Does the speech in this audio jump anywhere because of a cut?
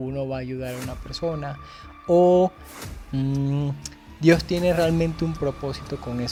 no; 0 cuts

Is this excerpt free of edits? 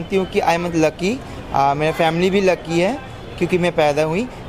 yes; 0 cuts

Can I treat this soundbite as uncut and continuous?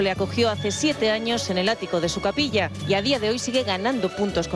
no; 1 cut; at 2.0 s

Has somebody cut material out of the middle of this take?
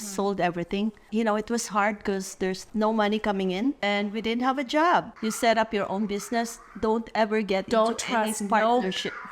yes; 3 cuts; at 1.1 s, 3.8 s, 5.1 s

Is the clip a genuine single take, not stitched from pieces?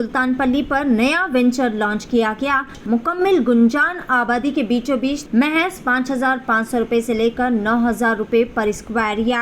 no; 2 cuts; at 2.8 s, 5.2 s

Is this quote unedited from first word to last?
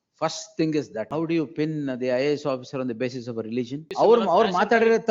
no; 2 cuts; at 1.1 s, 3.9 s

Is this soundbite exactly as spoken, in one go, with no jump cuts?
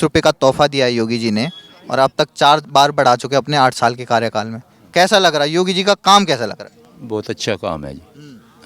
yes; 0 cuts

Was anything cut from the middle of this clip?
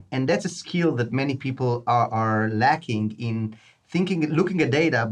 no; 0 cuts

